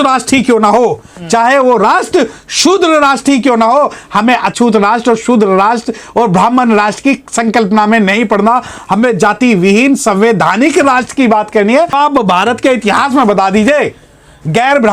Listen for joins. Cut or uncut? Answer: cut